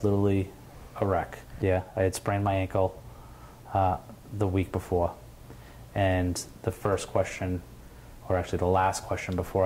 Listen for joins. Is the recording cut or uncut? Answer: cut